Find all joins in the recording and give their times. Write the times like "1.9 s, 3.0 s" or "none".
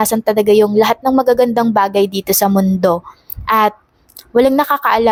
none